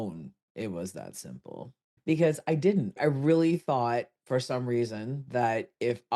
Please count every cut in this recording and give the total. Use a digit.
1